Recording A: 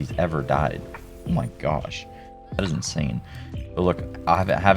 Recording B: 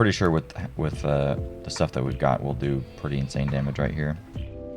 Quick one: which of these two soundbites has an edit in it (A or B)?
A